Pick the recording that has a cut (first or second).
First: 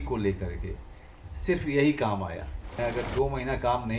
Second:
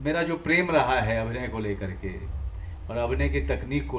first